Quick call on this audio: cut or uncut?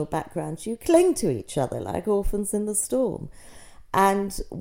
uncut